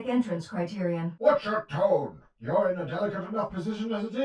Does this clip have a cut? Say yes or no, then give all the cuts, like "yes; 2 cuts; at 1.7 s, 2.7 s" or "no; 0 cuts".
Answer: no; 0 cuts